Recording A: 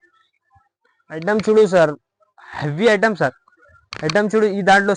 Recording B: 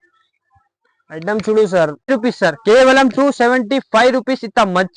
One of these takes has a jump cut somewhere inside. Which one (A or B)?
B